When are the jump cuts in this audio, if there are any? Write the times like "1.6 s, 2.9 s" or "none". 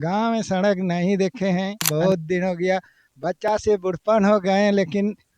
1.9 s